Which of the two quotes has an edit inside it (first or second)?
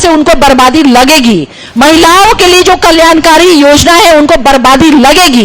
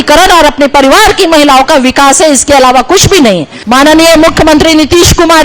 second